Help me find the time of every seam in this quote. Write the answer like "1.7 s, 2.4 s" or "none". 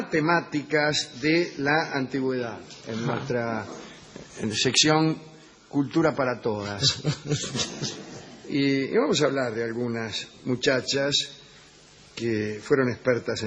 none